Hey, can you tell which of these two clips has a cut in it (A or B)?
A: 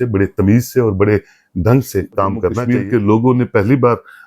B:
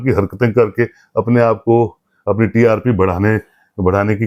A